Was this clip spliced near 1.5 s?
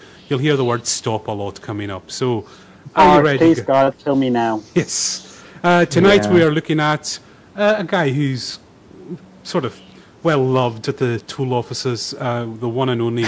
no; 1 cut; at 2.8 s

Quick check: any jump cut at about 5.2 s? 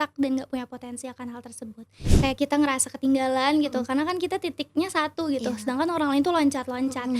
no; 1 cut; at 2.0 s

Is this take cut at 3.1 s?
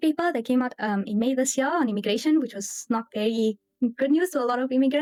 no; 0 cuts

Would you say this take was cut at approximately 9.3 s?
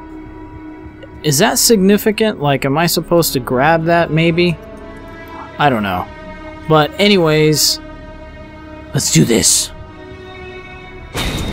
yes; 1 cut; at 9.3 s

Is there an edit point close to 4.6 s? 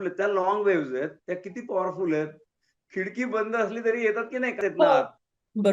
yes; 1 cut; at 4.6 s

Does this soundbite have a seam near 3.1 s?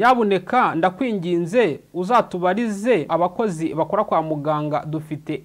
yes; 1 cut; at 3.1 s

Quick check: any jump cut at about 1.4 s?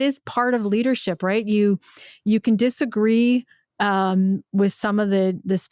no; 0 cuts

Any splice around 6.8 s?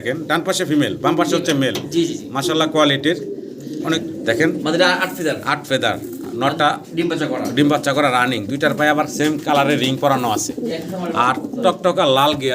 no; 1 cut; at 4.0 s

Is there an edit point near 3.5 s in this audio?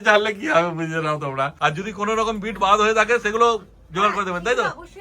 no; 1 cut; at 1.5 s

